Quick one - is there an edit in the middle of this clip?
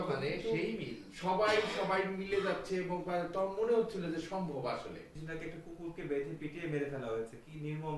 yes; 1 cut; at 5.0 s

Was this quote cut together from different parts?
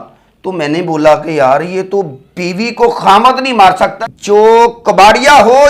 yes; 1 cut; at 4.1 s

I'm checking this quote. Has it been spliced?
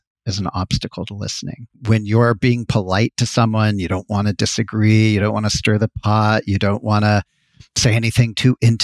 yes; 1 cut; at 1.8 s

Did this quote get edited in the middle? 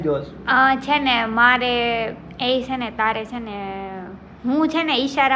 no; 0 cuts

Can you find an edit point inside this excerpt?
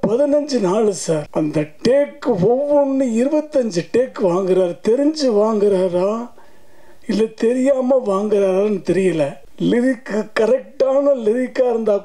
yes; 2 cuts; at 1.3 s, 9.4 s

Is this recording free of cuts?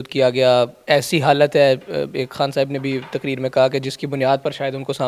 yes; 0 cuts

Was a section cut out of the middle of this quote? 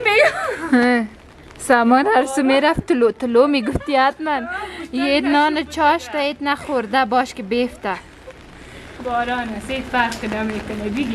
no; 0 cuts

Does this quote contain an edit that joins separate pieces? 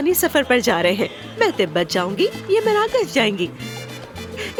no; 0 cuts

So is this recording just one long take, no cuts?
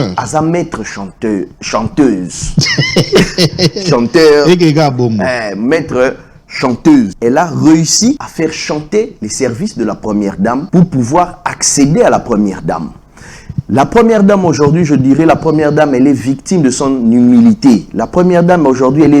no; 3 cuts; at 7.1 s, 8.3 s, 10.7 s

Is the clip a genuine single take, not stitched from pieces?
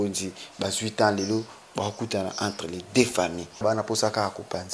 no; 1 cut; at 3.6 s

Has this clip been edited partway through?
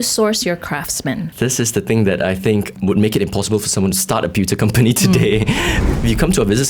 yes; 3 cuts; at 1.3 s, 2.8 s, 5.8 s

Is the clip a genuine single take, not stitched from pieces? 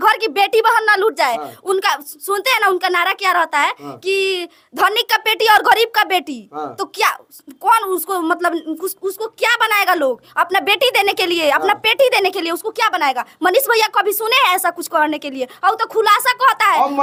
yes; 0 cuts

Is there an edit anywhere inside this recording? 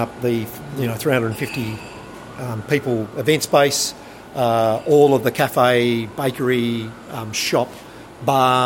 no; 0 cuts

